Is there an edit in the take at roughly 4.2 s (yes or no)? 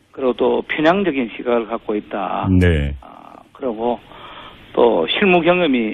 no